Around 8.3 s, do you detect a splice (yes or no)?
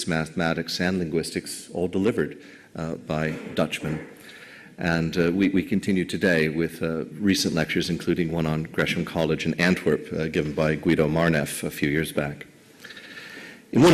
no